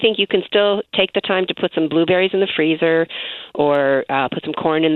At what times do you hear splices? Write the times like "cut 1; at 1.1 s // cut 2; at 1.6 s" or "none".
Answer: none